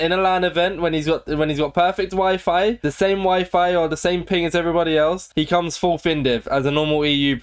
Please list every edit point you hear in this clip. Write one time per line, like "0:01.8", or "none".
none